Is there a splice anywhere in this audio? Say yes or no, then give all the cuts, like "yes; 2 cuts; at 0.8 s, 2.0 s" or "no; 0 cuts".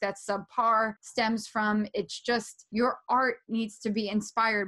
yes; 2 cuts; at 1.0 s, 2.6 s